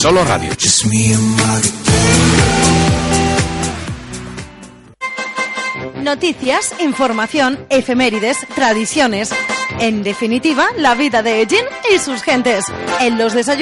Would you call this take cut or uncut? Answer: cut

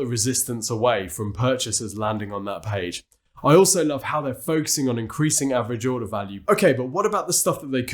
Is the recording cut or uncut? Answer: cut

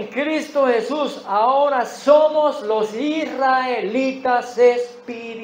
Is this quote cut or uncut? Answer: uncut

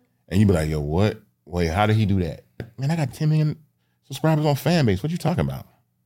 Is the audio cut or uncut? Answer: cut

